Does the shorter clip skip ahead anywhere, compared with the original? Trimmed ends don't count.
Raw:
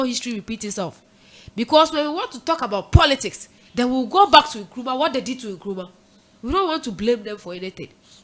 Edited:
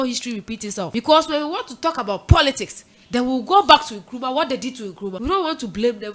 yes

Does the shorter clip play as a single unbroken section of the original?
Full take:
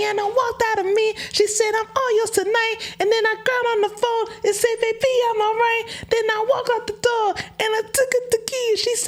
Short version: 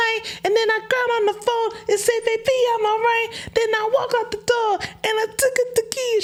yes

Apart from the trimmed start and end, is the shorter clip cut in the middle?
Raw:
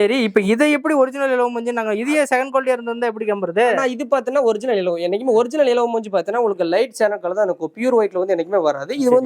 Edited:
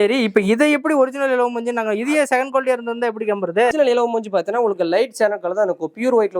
yes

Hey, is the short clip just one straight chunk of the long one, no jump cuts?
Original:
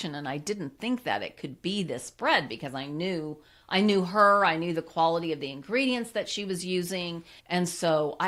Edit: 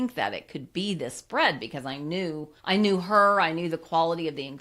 no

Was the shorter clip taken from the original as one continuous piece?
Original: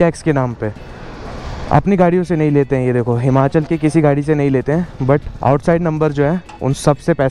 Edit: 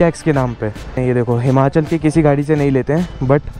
no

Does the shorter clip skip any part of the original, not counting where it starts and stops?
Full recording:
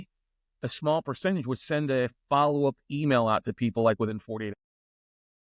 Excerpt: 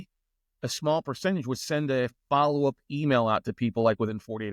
no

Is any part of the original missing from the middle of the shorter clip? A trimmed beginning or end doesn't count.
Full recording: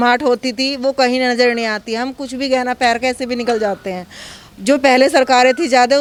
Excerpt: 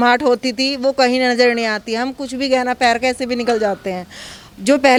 no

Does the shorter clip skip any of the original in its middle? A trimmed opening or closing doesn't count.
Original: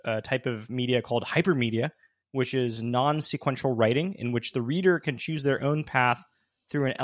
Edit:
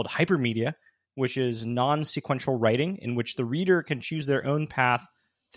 no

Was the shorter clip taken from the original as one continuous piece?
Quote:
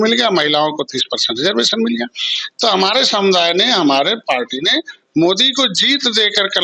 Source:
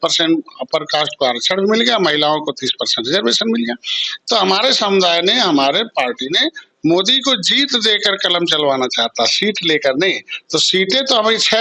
yes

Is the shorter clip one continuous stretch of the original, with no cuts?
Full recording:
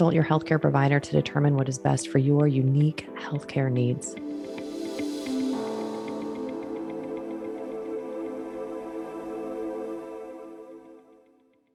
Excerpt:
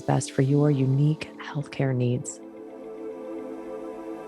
no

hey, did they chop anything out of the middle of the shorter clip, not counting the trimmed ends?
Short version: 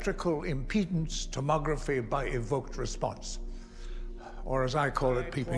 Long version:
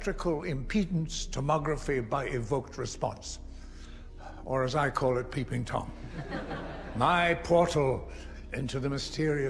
no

